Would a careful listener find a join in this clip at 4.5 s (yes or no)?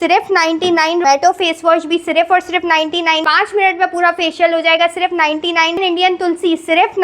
no